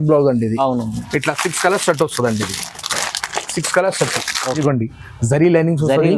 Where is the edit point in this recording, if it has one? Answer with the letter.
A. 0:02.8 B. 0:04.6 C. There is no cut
B